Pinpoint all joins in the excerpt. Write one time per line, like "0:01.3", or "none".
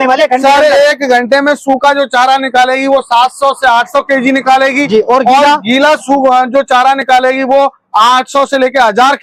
none